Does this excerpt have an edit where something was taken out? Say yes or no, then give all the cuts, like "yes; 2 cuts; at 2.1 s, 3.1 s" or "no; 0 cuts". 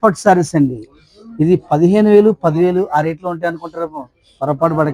no; 0 cuts